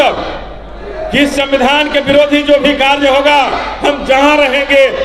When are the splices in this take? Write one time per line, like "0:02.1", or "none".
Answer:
none

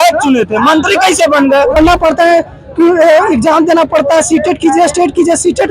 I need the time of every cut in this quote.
0:01.8

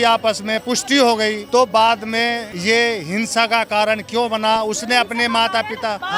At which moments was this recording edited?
none

